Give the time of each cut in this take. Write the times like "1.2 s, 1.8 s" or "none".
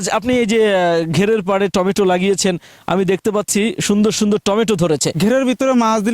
5.2 s